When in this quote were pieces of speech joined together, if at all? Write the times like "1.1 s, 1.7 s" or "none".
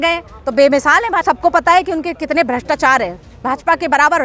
1.2 s